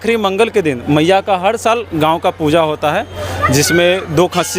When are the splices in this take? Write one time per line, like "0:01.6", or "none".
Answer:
none